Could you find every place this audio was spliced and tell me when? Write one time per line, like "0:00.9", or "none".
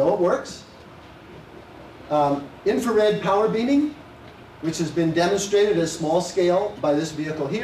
none